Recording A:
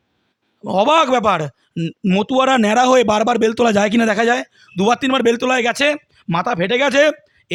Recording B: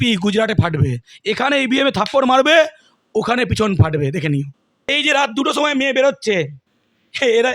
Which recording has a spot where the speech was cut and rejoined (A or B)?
B